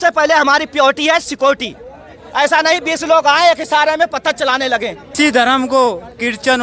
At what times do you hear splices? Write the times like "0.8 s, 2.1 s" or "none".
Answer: 5.1 s